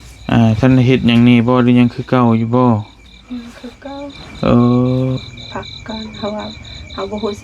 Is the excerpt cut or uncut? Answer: cut